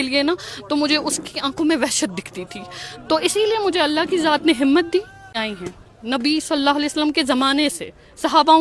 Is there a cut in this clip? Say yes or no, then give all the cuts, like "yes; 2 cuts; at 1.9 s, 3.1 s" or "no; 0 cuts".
yes; 1 cut; at 5.3 s